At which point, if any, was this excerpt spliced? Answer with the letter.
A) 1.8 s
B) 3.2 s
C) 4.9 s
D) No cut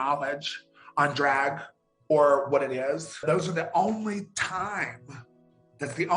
B